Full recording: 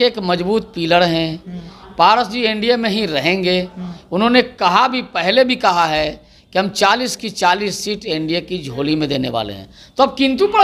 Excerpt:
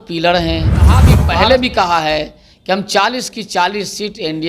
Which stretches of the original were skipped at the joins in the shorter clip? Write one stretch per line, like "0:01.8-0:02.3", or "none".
0:01.8-0:05.0